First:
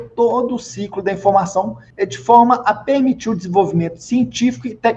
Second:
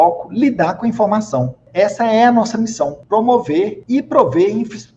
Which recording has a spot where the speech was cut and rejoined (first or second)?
second